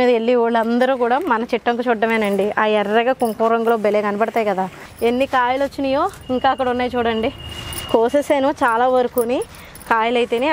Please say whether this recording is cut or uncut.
cut